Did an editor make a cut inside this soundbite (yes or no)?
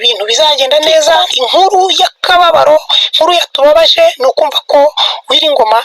yes